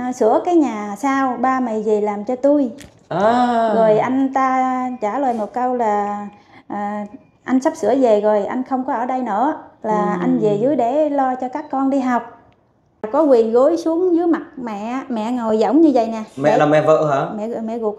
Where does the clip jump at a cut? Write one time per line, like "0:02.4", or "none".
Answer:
0:13.1